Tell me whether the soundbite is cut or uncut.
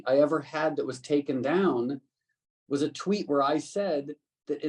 uncut